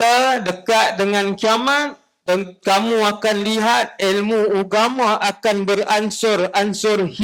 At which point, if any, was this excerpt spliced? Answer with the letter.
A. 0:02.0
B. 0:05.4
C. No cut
C